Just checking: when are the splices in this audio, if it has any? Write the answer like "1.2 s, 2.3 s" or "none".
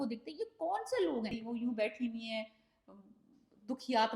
1.4 s